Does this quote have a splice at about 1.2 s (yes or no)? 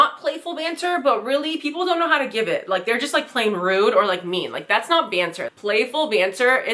no